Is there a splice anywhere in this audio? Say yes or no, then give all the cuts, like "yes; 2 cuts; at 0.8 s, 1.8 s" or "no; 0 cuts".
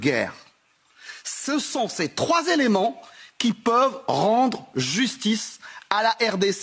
no; 0 cuts